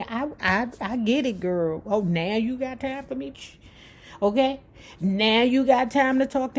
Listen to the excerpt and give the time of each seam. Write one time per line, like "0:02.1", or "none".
0:03.3

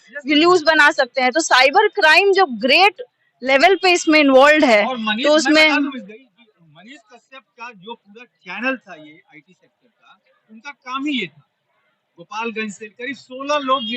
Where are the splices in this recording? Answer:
none

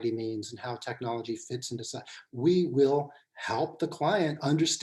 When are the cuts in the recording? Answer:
0:02.1

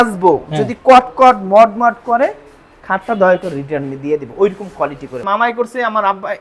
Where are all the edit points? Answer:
0:05.2

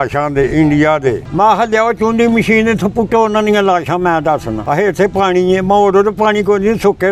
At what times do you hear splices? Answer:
0:01.2
0:04.5

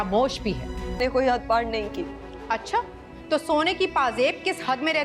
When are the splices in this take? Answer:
0:01.0

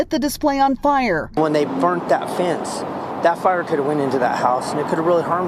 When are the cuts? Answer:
none

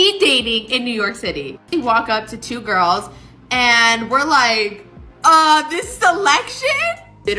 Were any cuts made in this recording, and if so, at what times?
0:01.7

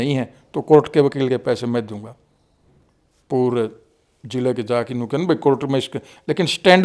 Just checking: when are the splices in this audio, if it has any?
none

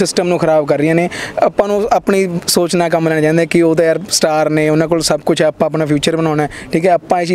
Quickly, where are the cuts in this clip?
none

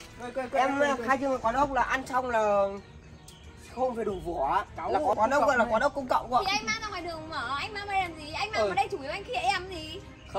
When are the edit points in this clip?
0:05.1

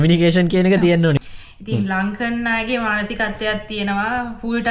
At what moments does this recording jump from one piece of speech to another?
0:01.2

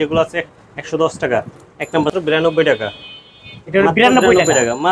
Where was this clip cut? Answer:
0:02.2

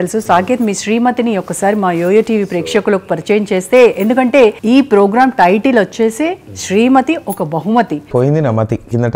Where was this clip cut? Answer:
0:04.6
0:08.0

